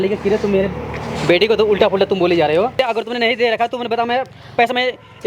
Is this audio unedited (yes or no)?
no